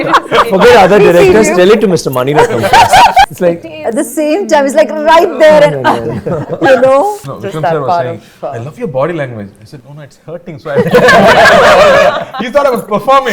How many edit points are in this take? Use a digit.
2